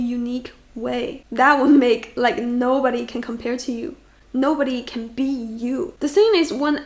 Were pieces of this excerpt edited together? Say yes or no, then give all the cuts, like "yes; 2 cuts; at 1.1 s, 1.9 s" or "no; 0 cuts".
yes; 1 cut; at 4.1 s